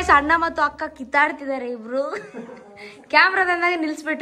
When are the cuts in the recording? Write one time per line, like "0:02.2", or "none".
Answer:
none